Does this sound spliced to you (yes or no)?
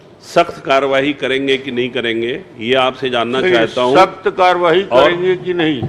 no